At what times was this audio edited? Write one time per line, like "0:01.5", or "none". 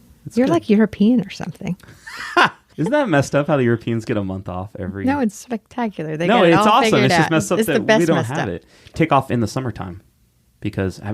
0:02.6
0:09.0